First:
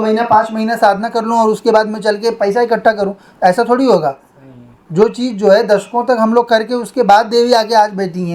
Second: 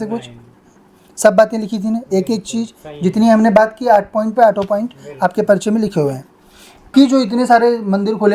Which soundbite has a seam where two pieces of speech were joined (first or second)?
second